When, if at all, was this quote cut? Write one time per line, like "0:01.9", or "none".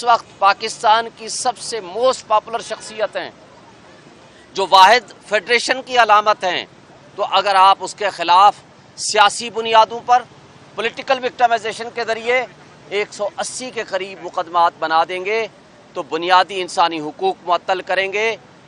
none